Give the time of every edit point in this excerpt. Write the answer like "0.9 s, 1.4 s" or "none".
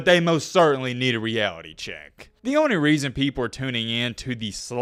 none

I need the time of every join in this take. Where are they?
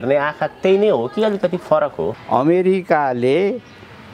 2.1 s

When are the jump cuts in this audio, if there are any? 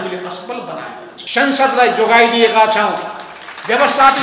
1.1 s

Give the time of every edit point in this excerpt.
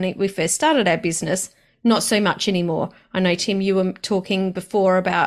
none

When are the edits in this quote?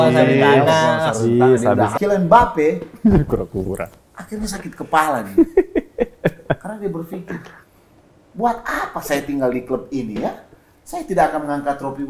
1.9 s

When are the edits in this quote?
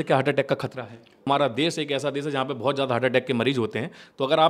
1.3 s

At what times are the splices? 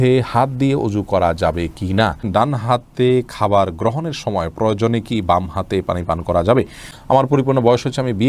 2.2 s, 6.9 s

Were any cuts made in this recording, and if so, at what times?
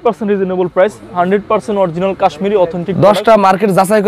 none

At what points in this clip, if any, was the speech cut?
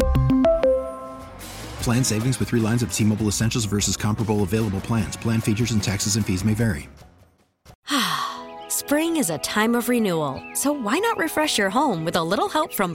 7.7 s

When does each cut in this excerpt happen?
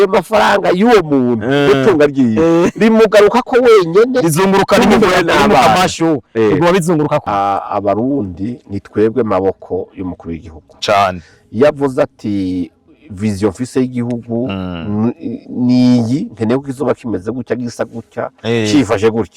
7.2 s

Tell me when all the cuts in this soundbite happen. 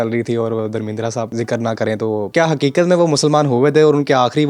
1.3 s, 2.3 s

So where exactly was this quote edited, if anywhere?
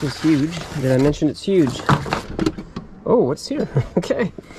2.3 s

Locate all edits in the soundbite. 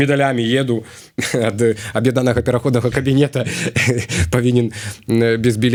none

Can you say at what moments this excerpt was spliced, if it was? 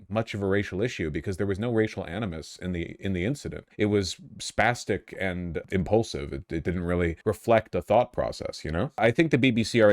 3.6 s, 5.6 s, 7.2 s, 9.0 s

